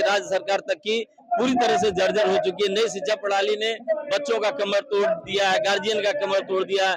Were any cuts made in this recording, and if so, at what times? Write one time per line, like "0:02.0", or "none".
none